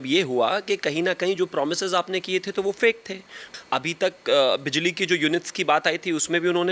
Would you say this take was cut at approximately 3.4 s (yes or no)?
yes